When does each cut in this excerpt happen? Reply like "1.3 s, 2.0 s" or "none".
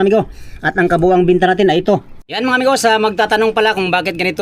2.2 s